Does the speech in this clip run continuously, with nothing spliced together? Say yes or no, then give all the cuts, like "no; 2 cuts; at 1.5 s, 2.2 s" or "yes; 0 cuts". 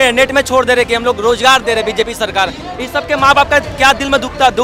yes; 0 cuts